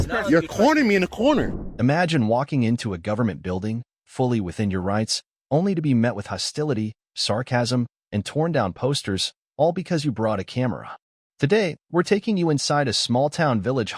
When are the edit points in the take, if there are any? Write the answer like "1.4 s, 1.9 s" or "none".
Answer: 1.6 s